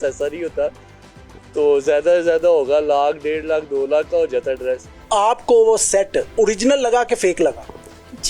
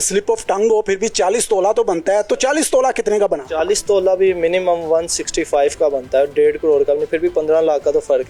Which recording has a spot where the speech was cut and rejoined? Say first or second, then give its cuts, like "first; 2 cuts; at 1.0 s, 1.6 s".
first; 2 cuts; at 4.9 s, 6.4 s